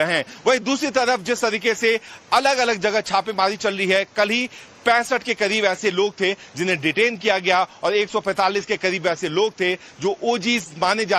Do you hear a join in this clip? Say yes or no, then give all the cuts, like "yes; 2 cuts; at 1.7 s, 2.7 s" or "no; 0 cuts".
no; 0 cuts